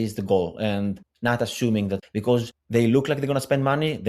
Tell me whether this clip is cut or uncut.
cut